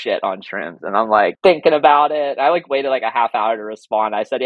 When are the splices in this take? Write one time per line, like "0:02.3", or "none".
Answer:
0:01.4